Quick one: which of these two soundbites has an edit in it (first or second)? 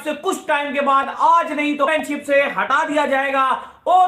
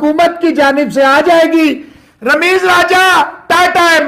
first